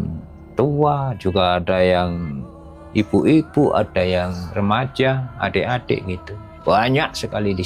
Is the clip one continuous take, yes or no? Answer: yes